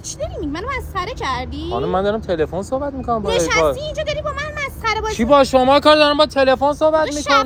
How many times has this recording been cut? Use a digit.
0